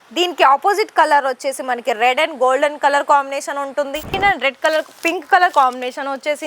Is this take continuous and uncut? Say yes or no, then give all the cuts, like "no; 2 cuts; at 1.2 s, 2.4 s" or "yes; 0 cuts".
no; 1 cut; at 4.2 s